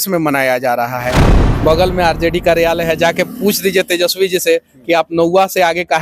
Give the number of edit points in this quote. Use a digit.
1